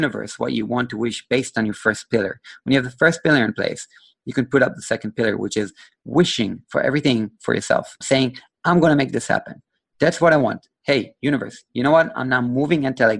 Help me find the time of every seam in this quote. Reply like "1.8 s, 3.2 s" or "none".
8.0 s